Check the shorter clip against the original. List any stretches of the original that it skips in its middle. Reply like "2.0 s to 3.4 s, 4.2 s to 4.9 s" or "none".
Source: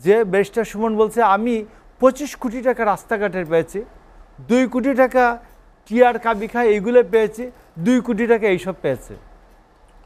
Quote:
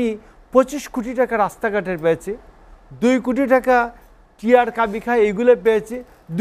none